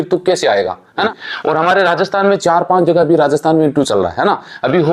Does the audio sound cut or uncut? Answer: cut